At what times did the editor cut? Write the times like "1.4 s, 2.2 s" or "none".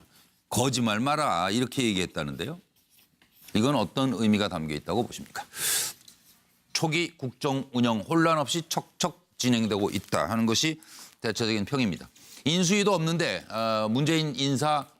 none